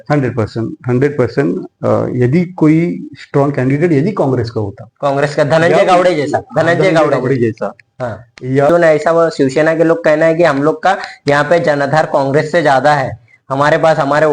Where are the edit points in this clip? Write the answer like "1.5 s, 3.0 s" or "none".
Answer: 8.7 s